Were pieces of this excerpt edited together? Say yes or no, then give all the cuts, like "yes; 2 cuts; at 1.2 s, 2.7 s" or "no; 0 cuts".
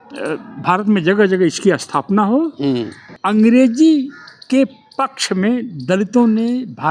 yes; 1 cut; at 3.1 s